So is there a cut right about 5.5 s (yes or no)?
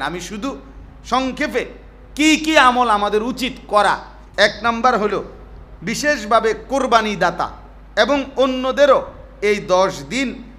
no